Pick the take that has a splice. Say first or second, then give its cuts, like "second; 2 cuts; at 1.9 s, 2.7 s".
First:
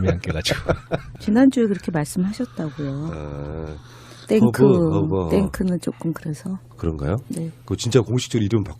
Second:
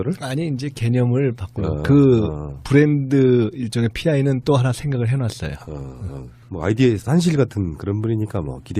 second; 1 cut; at 3.4 s